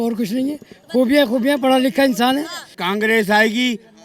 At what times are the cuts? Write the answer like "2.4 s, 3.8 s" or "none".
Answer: 2.7 s